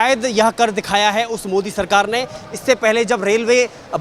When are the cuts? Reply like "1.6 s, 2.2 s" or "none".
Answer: none